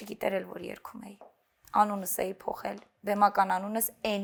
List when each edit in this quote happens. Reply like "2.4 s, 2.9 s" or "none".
none